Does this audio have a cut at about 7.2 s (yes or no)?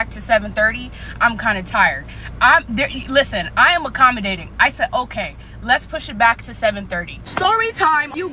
yes